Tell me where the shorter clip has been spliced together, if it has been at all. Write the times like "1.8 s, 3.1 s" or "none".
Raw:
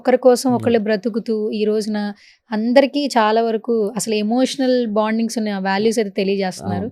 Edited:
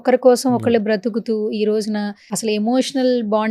2.3 s